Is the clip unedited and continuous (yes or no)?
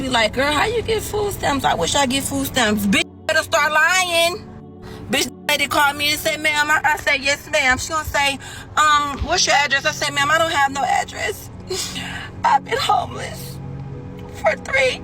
yes